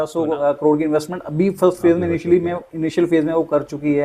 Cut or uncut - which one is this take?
uncut